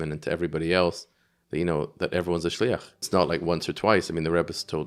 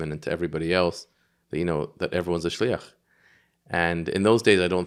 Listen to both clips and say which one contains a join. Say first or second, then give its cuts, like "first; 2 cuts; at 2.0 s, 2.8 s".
first; 1 cut; at 3.0 s